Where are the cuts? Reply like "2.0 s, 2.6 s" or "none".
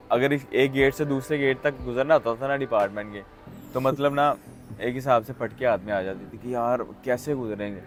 none